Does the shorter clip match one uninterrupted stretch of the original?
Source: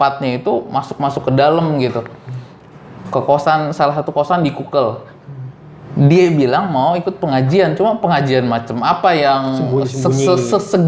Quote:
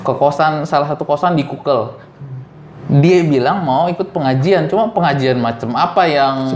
yes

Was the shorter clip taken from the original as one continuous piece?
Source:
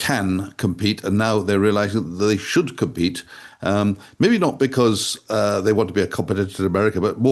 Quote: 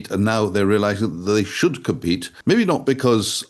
no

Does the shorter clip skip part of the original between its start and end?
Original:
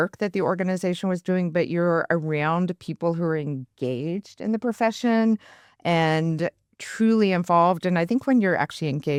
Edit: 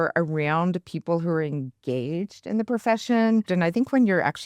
yes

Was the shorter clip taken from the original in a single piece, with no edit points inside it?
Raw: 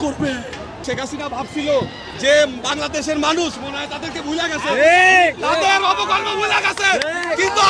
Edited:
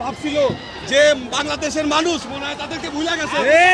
yes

